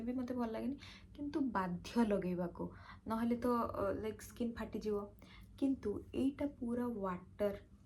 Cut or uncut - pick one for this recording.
uncut